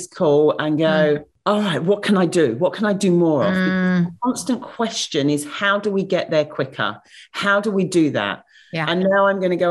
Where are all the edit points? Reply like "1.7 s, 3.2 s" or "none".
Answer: 1.3 s